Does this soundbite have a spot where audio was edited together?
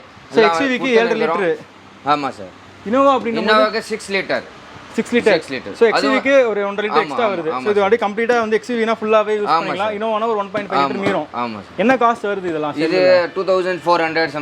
no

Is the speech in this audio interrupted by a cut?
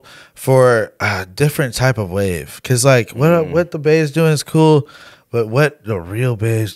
no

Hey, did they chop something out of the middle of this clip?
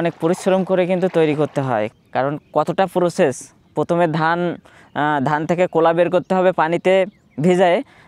yes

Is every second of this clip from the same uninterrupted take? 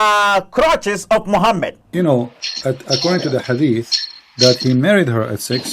no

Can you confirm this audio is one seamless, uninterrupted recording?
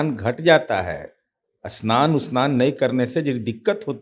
yes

